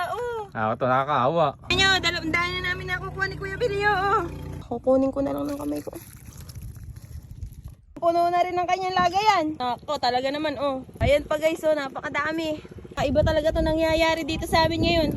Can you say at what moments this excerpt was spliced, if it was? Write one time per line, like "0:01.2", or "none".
0:01.7
0:04.5
0:09.6
0:10.9
0:12.8